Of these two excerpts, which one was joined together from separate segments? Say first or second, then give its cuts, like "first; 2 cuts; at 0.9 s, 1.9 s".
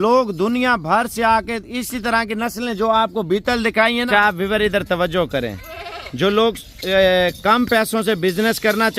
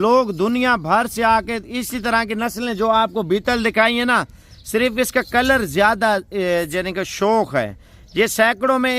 first; 1 cut; at 4.1 s